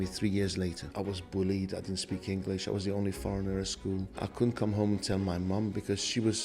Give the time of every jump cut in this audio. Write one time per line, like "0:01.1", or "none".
0:00.8
0:04.2